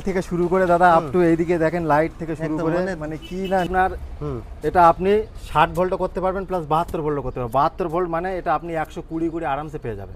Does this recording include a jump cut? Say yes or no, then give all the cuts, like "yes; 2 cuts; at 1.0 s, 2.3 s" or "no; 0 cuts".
yes; 1 cut; at 3.7 s